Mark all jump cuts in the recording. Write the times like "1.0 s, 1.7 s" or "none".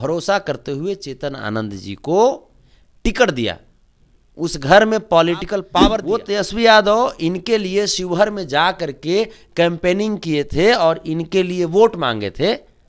5.7 s